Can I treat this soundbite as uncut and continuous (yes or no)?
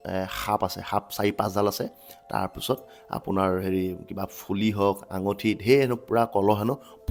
yes